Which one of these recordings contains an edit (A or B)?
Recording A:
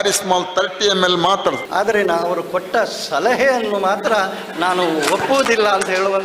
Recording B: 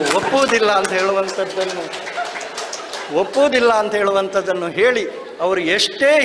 A